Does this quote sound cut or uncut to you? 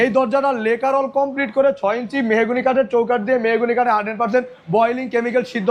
uncut